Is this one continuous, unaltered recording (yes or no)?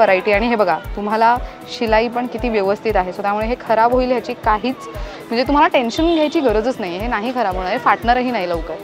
yes